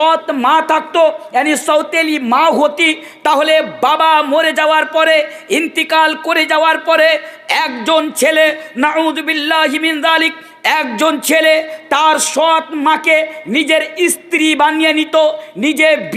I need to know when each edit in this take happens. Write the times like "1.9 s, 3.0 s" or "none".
none